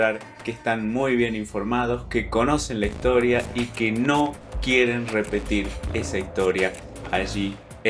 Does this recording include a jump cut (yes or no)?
no